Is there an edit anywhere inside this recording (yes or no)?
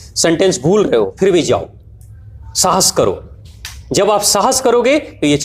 no